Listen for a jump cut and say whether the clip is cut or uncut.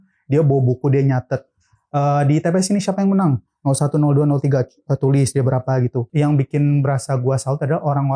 cut